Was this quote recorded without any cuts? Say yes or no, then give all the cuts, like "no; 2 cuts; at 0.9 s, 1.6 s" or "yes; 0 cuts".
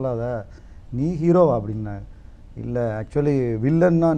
yes; 0 cuts